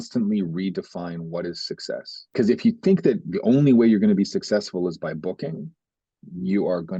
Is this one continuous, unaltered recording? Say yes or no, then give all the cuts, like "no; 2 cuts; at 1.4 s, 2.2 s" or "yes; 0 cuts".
yes; 0 cuts